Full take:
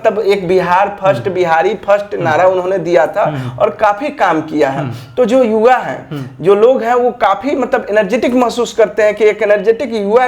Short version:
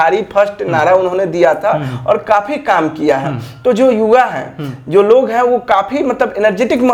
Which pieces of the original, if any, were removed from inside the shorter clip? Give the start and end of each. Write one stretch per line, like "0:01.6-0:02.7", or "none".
none